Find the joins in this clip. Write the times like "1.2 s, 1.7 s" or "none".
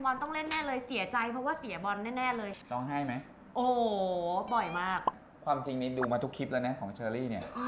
2.6 s, 5.2 s